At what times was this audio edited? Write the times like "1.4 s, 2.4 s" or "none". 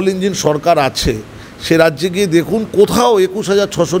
none

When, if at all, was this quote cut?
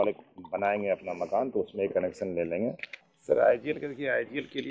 2.9 s

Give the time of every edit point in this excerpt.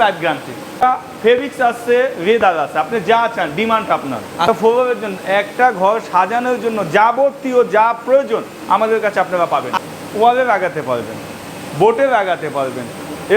0.8 s, 4.5 s, 9.8 s

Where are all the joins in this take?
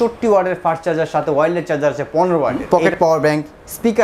2.6 s

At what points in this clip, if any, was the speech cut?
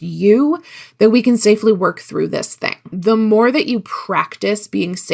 2.9 s

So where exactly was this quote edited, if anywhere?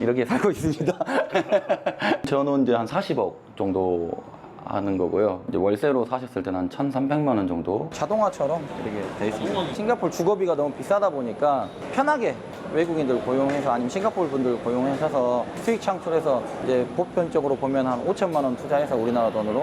2.2 s, 7.9 s, 11.8 s

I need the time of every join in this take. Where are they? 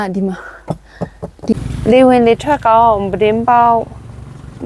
1.5 s

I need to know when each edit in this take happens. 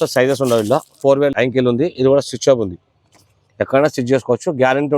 1.2 s

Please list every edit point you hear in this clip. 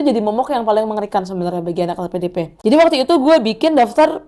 2.5 s

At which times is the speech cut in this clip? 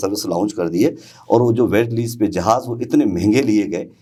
none

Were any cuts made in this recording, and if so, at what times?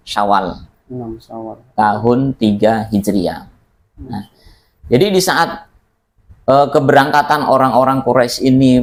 none

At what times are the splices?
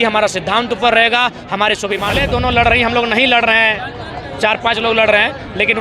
2.1 s

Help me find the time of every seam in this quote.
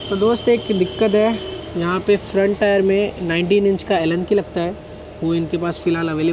none

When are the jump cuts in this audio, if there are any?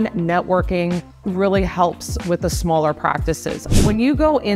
1.1 s, 3.5 s

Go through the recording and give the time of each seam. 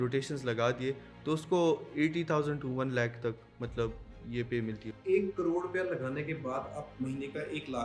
none

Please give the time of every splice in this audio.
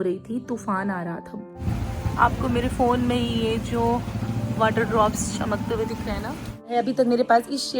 1.5 s, 6.7 s

